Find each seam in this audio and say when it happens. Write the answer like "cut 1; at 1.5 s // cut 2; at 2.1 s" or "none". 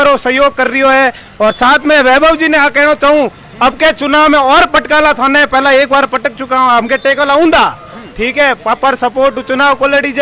none